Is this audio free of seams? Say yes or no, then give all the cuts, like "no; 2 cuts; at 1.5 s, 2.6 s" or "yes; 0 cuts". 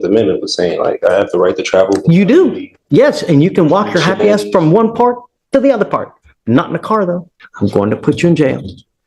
no; 1 cut; at 7.3 s